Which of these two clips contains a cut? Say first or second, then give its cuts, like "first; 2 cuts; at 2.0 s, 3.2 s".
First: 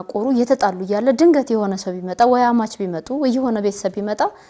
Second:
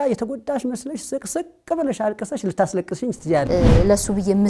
second; 1 cut; at 3.5 s